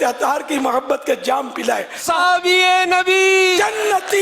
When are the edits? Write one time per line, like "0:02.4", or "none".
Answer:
0:02.0